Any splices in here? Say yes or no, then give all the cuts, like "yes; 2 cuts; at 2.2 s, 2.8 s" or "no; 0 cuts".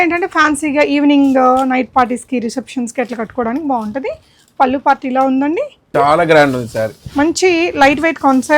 yes; 1 cut; at 5.9 s